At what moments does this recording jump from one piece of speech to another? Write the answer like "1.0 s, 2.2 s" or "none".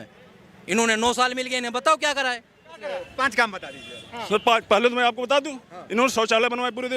2.8 s